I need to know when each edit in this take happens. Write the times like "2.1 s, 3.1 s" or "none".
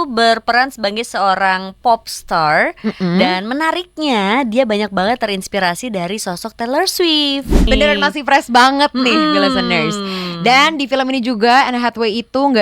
7.6 s